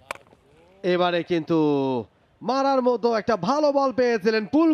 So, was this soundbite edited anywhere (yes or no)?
no